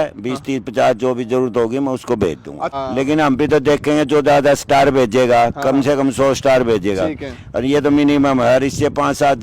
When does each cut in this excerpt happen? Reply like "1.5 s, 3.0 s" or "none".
2.8 s

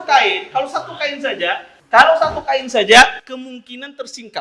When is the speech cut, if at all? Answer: 1.7 s

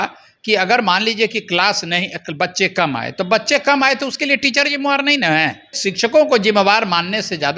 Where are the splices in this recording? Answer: 5.8 s

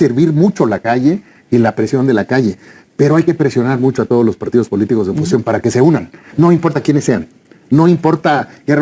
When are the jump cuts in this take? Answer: none

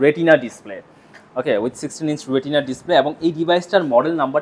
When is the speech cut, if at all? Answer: none

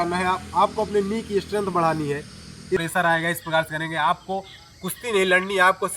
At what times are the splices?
2.8 s

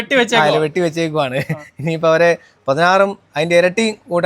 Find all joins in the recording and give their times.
none

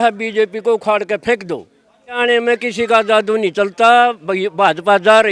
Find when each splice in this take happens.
2.2 s

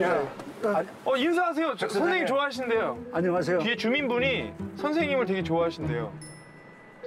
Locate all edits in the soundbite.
none

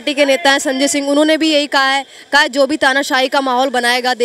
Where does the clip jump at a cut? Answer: none

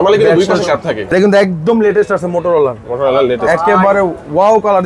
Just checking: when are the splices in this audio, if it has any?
1.0 s

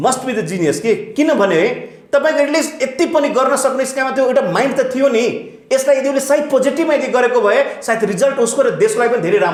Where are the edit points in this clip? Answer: none

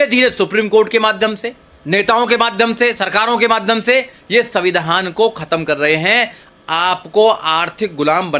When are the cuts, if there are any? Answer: none

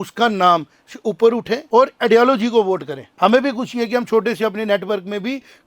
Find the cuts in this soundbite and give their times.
1.6 s, 3.0 s

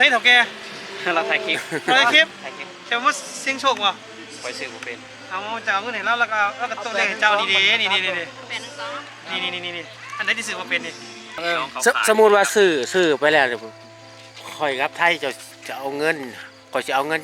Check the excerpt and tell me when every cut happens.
11.4 s

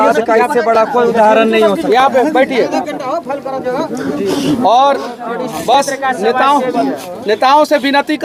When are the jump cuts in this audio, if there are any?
none

